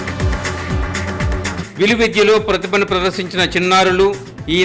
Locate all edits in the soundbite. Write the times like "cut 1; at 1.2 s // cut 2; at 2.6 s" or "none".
cut 1; at 1.4 s